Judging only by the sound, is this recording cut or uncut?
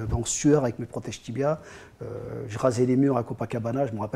uncut